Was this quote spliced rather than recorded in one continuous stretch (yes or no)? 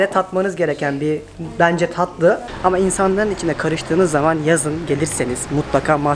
yes